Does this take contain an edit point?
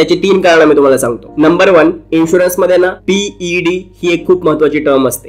no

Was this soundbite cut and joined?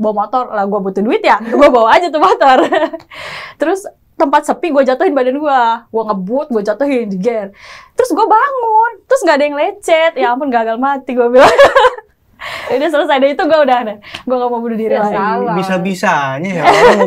no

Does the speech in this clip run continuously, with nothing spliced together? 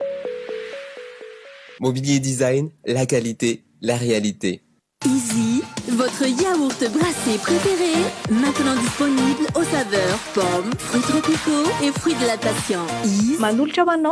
no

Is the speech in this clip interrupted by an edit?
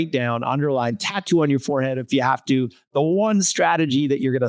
no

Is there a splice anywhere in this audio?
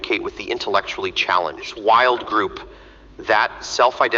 yes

